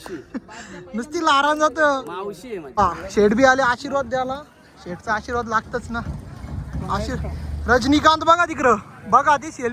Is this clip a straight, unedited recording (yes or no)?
no